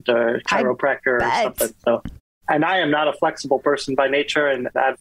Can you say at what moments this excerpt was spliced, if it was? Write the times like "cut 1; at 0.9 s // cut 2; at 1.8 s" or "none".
cut 1; at 2.3 s